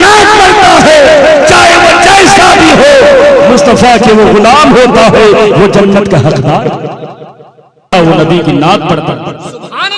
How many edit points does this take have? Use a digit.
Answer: 1